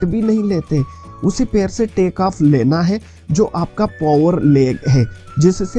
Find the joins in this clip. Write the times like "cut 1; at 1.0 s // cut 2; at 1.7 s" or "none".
cut 1; at 1.0 s